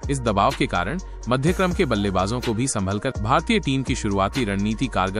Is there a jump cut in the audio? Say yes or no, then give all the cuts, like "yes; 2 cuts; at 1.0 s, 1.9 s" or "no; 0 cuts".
yes; 1 cut; at 3.2 s